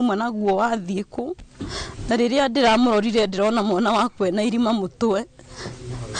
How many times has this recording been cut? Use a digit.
0